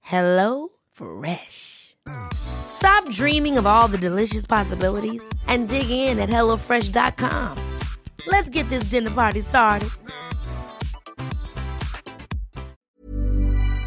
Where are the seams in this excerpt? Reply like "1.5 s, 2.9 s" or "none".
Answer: 12.8 s